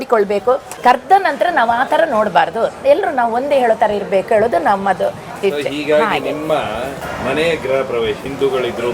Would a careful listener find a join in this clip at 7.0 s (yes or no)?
no